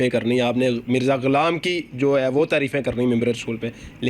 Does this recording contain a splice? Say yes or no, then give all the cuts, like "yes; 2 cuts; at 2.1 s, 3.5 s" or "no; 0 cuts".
no; 0 cuts